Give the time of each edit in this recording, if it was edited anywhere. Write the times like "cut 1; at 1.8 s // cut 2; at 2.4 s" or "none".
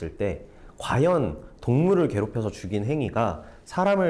none